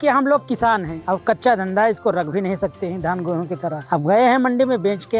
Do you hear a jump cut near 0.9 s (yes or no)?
yes